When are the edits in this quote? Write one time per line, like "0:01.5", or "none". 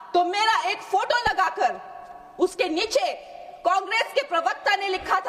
none

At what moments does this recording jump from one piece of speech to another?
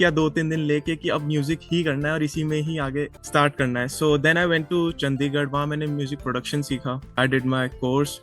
0:03.2
0:07.2

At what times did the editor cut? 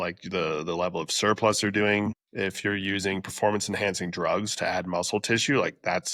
0:02.2

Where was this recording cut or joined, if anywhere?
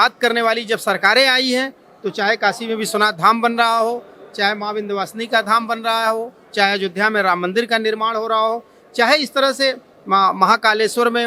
none

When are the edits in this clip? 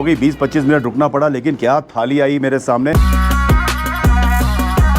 0:02.9

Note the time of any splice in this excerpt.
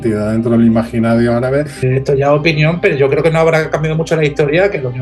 0:01.8

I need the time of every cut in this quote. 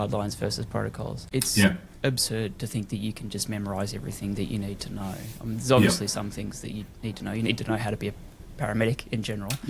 0:01.2

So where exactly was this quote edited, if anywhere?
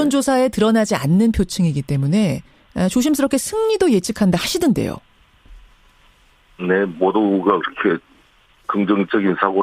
none

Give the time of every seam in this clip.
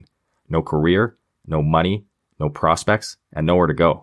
none

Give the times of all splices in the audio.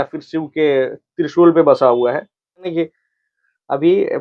0:02.7

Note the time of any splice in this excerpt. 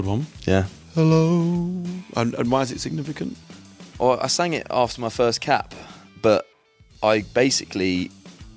none

